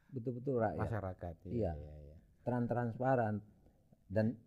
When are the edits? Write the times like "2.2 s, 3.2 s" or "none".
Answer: none

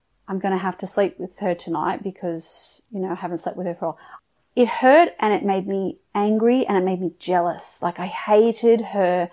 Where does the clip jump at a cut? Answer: 4.1 s

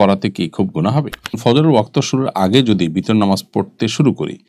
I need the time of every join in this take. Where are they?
1.4 s

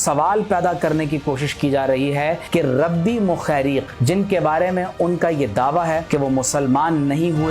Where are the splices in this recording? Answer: 2.4 s, 3.9 s, 6.0 s

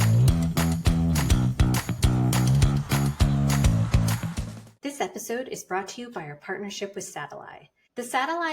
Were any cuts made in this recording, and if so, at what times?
2.9 s, 4.4 s

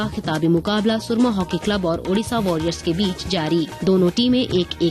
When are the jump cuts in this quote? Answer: 3.7 s

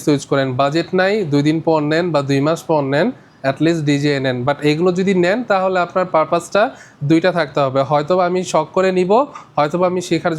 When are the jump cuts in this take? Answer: none

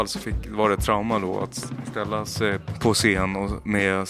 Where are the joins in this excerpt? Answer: 2.6 s

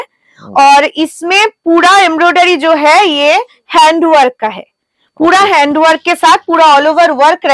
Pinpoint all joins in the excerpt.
none

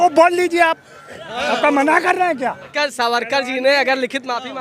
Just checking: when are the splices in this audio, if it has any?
2.7 s

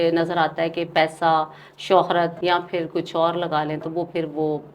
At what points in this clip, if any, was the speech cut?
2.4 s

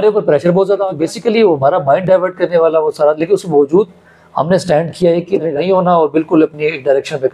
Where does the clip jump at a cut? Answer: 0.9 s, 5.5 s

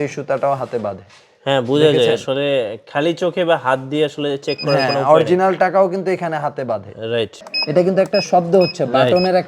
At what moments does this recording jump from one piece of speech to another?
7.5 s

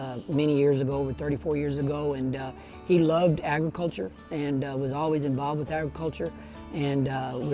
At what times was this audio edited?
none

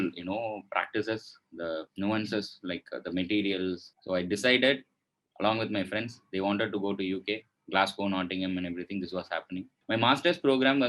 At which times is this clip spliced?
3.9 s, 9.7 s

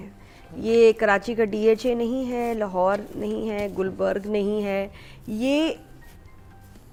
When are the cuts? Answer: none

